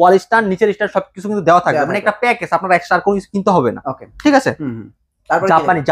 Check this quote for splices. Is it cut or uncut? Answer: uncut